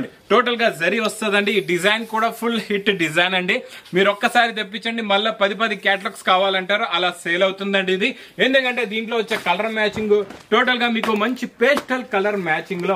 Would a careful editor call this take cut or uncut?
uncut